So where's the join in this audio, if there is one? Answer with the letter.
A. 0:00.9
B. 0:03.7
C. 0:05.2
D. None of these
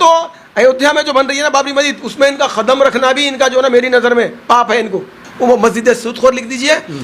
C